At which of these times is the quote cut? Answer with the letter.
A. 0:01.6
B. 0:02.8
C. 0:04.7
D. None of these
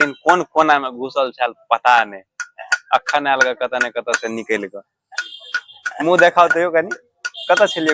D